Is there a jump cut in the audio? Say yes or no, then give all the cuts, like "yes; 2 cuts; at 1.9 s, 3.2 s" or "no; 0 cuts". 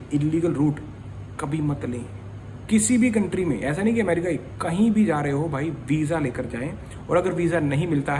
no; 0 cuts